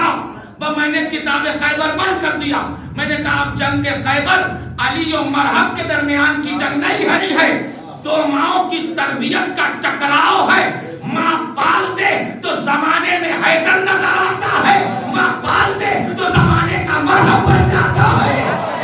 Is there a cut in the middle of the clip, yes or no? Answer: yes